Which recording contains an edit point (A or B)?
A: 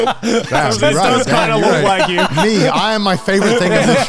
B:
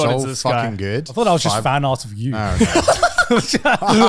B